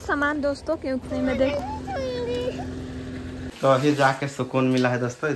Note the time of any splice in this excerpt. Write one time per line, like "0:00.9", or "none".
0:01.0
0:03.4